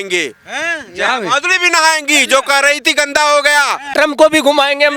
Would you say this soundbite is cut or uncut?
cut